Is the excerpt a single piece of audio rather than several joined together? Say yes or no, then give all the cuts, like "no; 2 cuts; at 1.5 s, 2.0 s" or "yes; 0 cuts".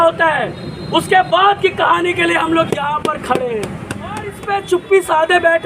no; 1 cut; at 4.4 s